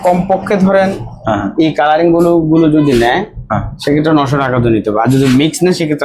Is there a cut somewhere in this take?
no; 0 cuts

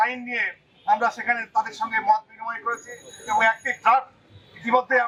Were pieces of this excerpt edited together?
no; 0 cuts

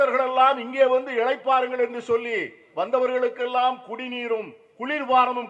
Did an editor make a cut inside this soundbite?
no; 0 cuts

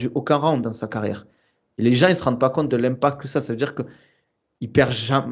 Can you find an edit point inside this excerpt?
no; 0 cuts

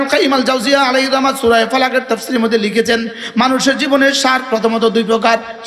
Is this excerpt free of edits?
yes; 0 cuts

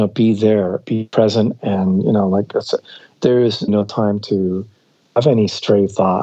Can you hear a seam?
yes; 2 cuts; at 3.7 s, 5.0 s

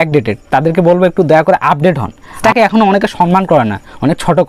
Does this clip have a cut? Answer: yes; 1 cut; at 2.3 s

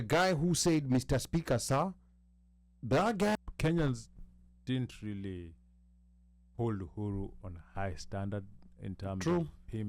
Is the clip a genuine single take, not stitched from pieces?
no; 1 cut; at 3.4 s

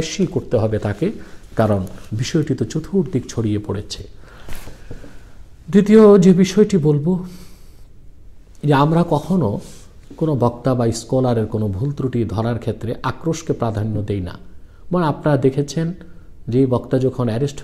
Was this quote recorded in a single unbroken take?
yes; 0 cuts

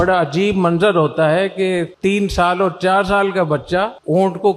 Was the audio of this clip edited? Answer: no; 0 cuts

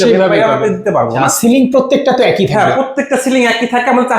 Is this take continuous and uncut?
no; 1 cut; at 1.2 s

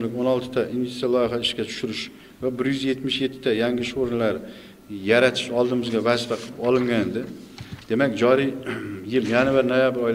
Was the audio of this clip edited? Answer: no; 0 cuts

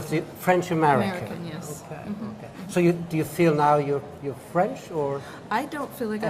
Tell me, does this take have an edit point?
yes; 1 cut; at 5.4 s

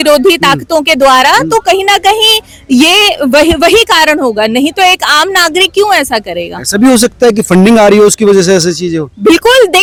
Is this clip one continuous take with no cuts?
yes; 0 cuts

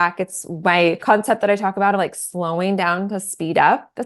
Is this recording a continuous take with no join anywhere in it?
no; 1 cut; at 1.0 s

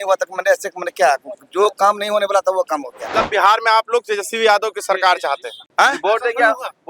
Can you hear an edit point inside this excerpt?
yes; 2 cuts; at 3.1 s, 5.6 s

